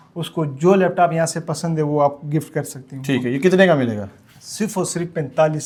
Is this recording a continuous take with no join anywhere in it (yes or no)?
yes